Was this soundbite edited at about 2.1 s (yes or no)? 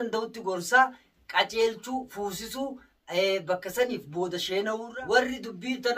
no